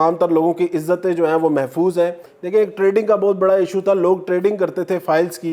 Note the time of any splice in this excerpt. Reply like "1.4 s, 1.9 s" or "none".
2.3 s